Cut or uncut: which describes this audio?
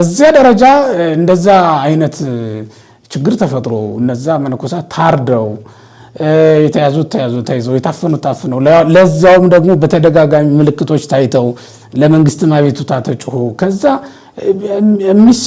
uncut